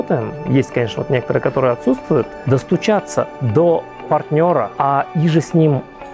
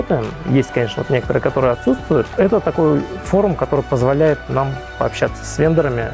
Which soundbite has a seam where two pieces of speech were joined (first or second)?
first